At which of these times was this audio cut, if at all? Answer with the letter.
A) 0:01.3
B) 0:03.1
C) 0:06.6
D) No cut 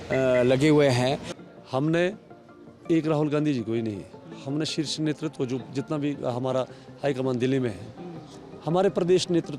A